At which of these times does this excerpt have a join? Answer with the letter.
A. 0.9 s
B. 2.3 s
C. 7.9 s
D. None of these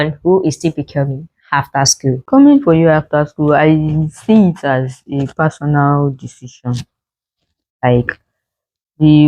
B